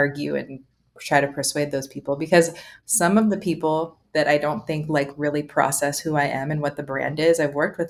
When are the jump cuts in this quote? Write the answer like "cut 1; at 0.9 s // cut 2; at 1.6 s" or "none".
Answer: none